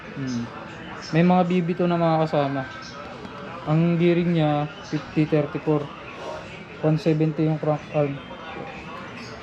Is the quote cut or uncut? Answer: uncut